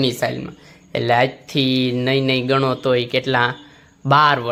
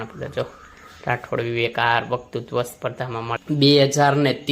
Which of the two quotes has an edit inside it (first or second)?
second